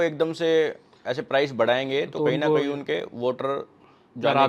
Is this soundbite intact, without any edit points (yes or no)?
yes